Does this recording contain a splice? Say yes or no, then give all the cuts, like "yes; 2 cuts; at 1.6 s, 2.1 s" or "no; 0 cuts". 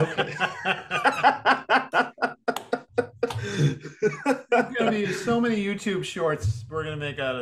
no; 0 cuts